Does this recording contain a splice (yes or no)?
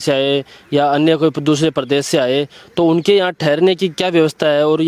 no